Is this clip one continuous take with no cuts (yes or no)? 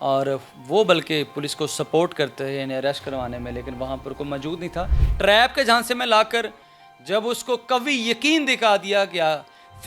no